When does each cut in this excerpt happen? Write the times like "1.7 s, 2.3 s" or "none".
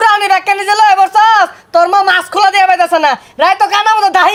none